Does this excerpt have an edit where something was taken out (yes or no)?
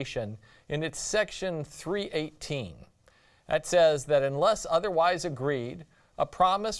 yes